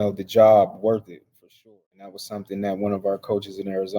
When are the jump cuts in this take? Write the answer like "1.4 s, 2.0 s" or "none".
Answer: 1.7 s